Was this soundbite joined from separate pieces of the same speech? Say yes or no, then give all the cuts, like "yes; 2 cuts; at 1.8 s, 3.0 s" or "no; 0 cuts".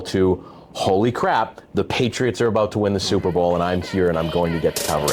no; 0 cuts